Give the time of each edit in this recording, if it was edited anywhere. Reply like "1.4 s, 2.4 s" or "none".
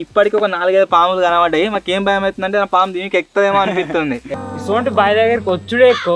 4.3 s